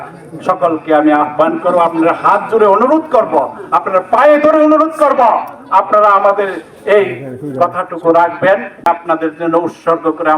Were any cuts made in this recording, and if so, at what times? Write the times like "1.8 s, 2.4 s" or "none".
8.9 s